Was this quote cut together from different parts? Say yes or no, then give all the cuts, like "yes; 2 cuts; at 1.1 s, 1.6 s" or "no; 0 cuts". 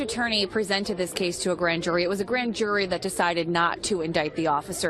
no; 0 cuts